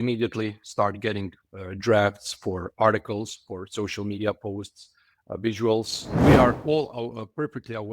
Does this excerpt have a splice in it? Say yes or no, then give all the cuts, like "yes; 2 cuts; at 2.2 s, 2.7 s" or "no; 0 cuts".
yes; 1 cut; at 6.1 s